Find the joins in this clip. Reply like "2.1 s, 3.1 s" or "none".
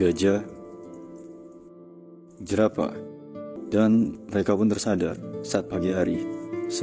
3.5 s